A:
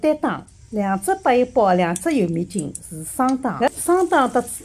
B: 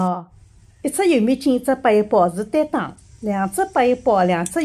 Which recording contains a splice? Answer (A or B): A